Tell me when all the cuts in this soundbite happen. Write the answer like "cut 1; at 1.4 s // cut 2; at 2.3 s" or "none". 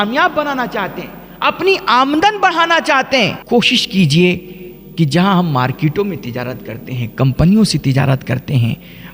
cut 1; at 3.4 s